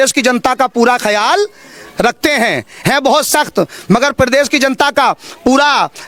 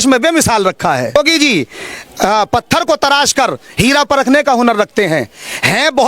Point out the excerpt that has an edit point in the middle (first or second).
second